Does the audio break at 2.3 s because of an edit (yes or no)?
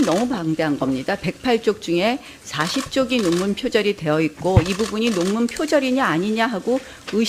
no